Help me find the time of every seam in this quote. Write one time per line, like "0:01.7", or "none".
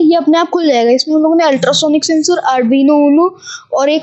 none